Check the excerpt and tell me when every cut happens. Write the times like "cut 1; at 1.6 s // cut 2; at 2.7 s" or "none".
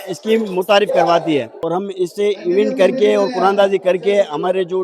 cut 1; at 1.5 s